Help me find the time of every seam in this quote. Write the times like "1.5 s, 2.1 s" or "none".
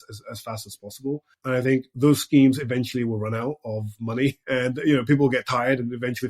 1.3 s, 4.4 s